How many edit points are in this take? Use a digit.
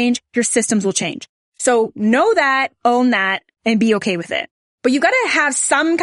0